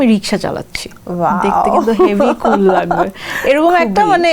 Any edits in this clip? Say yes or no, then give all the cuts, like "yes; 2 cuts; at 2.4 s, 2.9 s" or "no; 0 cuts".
no; 0 cuts